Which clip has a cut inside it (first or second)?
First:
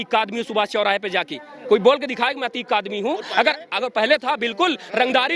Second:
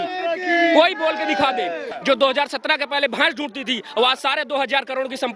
second